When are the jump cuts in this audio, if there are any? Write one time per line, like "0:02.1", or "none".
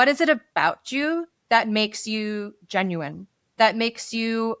none